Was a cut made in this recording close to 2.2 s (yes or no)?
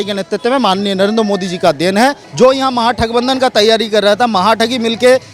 yes